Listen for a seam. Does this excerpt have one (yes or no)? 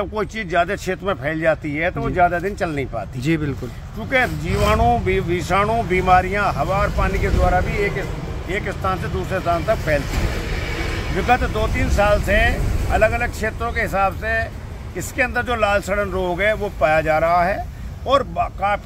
no